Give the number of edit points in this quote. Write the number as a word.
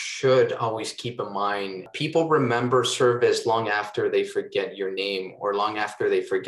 one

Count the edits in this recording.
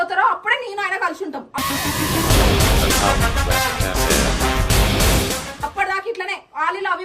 zero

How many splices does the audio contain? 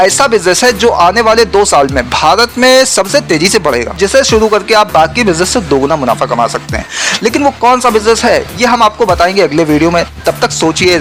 zero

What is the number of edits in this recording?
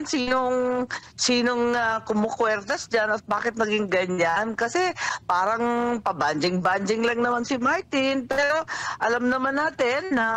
zero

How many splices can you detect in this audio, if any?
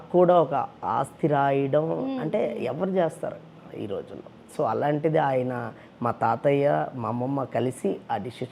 zero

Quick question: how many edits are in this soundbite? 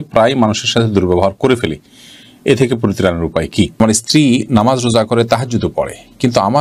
one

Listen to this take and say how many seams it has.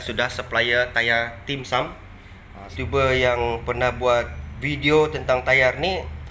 one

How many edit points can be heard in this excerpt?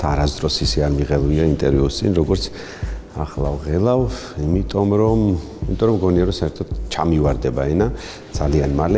zero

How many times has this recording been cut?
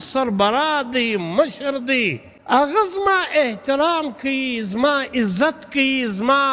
one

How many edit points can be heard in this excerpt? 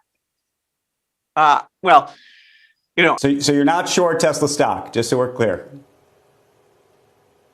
one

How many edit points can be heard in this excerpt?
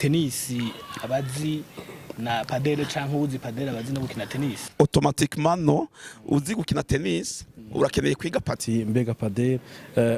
one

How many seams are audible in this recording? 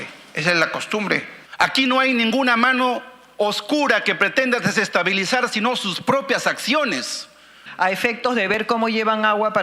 two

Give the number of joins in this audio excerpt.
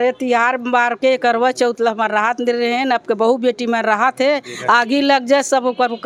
zero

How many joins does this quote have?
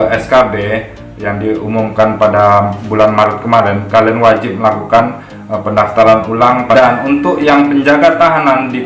one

